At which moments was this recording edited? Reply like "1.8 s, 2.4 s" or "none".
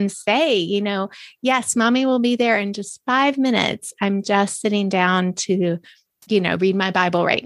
none